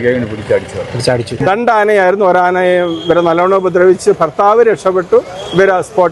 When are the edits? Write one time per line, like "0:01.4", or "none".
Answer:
0:01.4

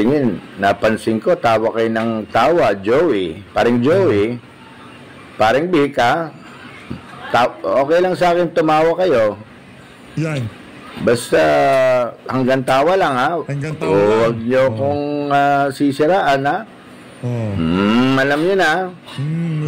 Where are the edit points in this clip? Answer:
none

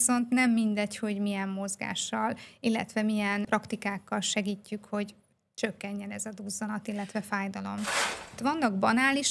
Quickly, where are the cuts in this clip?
0:08.1

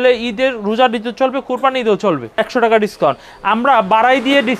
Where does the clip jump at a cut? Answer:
0:02.3

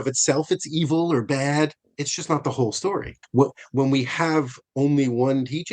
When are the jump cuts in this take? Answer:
0:03.2

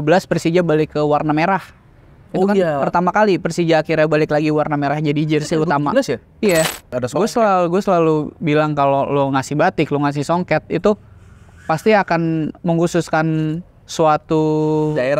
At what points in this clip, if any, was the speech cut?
0:06.8

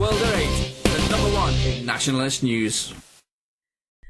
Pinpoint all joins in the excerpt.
0:00.9

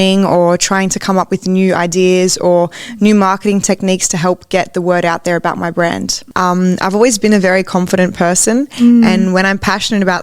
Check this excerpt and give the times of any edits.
0:06.1

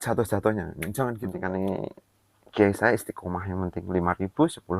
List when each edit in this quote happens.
0:01.4

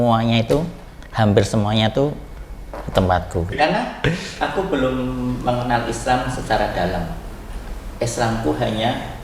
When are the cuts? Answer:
0:03.5

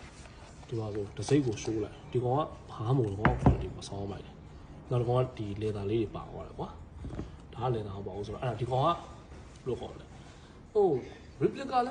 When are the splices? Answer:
none

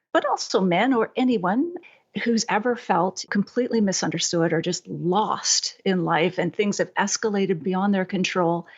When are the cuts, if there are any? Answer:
0:03.2

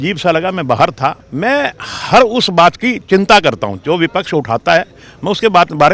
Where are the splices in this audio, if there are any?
0:01.2

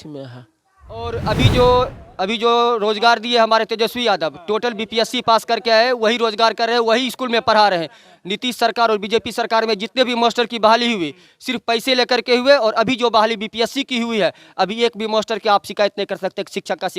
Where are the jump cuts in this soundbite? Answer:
0:01.0

